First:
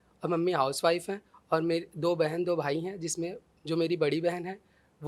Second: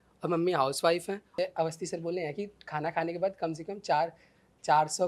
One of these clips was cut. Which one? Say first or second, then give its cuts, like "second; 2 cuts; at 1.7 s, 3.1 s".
second; 1 cut; at 1.3 s